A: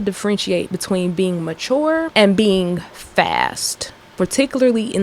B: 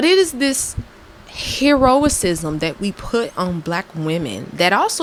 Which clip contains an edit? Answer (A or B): A